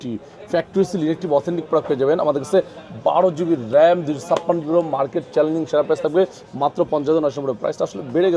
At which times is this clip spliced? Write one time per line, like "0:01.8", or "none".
none